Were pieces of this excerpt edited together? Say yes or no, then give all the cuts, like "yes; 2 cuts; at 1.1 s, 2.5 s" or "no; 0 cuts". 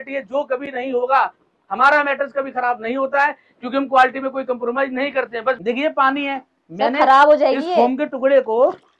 yes; 1 cut; at 5.6 s